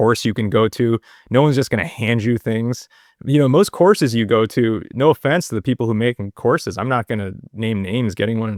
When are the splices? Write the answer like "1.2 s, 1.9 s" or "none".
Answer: none